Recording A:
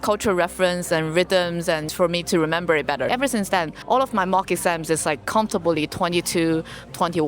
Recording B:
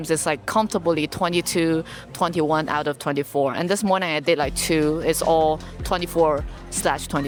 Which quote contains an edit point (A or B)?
A